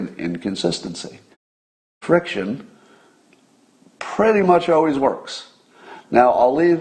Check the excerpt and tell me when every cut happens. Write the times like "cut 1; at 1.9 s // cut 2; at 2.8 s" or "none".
cut 1; at 1.9 s

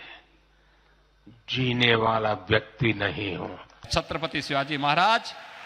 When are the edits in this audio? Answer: cut 1; at 3.9 s

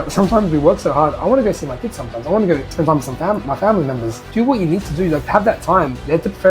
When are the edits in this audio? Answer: cut 1; at 4.2 s // cut 2; at 5.2 s

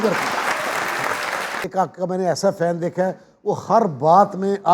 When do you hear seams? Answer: cut 1; at 1.6 s

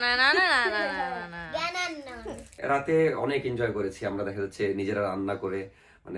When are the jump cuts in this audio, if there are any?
cut 1; at 2.6 s

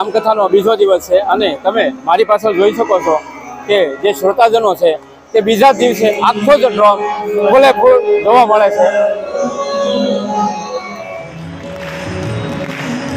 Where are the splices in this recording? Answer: none

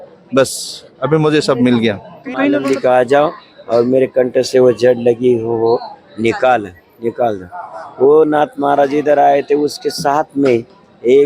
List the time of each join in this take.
cut 1; at 2.6 s

